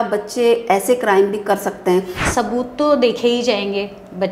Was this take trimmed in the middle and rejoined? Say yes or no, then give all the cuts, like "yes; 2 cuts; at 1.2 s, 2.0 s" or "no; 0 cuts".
yes; 1 cut; at 2.2 s